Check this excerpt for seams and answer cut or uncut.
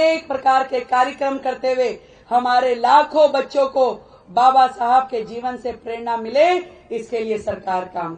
uncut